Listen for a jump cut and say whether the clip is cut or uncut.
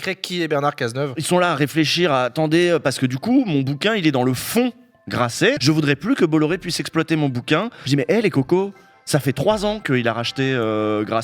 cut